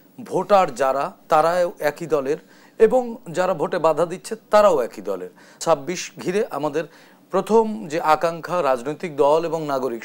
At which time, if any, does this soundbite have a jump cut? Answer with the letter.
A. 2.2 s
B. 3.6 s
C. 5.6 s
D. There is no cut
C